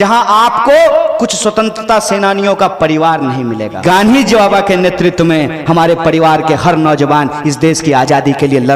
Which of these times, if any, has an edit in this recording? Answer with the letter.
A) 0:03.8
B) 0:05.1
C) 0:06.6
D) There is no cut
A